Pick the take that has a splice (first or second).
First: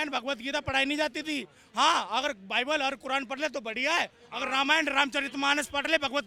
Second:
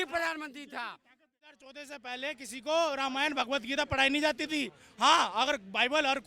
second